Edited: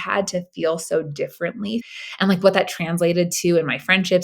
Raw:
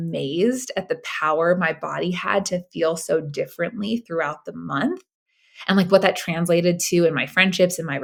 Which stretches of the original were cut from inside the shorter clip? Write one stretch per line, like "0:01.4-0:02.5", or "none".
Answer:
0:04.1-0:05.4

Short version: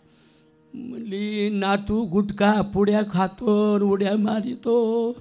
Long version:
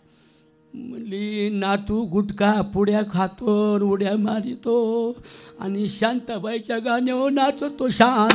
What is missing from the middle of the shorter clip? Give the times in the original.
none

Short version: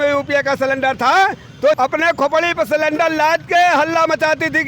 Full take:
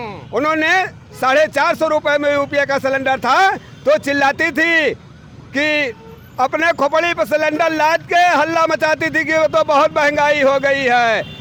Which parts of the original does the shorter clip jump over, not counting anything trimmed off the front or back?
0:04.0-0:06.4

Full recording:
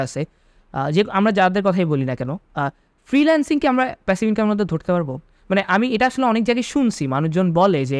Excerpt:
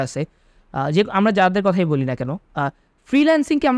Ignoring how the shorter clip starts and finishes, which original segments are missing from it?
none

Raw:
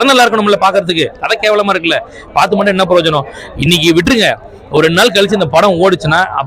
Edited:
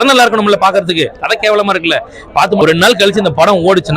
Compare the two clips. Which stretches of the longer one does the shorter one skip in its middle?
0:02.6-0:04.8

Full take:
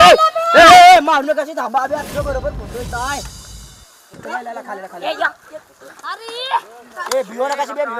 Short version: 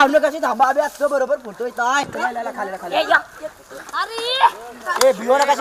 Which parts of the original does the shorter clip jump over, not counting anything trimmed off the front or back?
0:03.2-0:04.2

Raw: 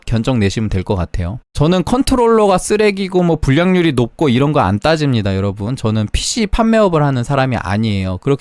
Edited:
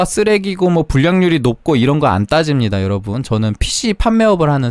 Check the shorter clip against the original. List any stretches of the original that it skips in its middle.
none

